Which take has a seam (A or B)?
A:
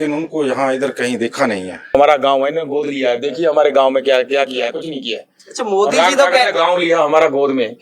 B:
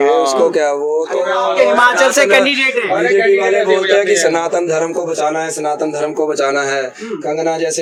A